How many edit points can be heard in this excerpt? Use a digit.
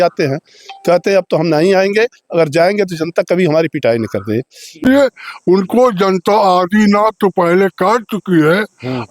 1